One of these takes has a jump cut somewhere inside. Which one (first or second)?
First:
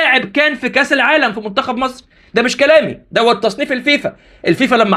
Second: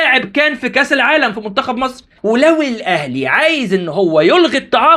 second